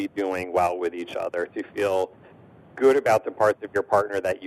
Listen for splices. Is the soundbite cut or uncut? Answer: uncut